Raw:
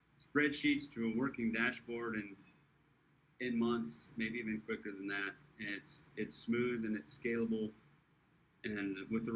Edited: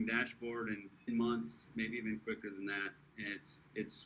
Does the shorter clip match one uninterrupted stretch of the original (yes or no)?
no